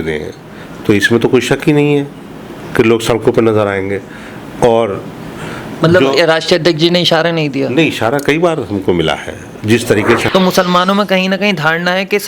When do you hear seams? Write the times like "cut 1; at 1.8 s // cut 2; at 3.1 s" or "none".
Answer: cut 1; at 10.2 s